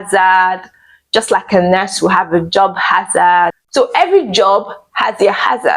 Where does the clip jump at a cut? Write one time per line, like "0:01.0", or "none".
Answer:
0:03.6